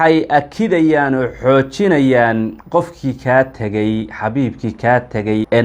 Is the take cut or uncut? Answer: uncut